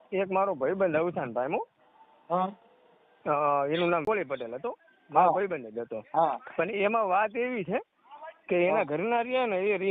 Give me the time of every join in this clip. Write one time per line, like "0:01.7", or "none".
0:04.0